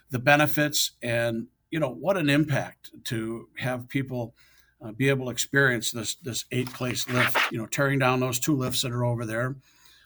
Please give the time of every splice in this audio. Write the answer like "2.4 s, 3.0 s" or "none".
7.5 s